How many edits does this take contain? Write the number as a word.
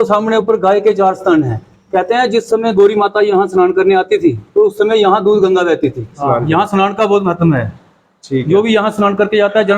one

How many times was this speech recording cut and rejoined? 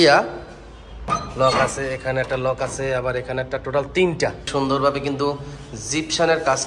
two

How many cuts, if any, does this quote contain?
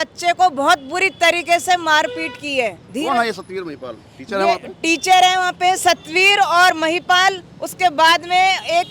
zero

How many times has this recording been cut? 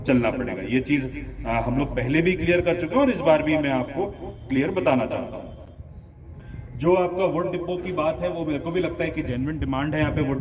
zero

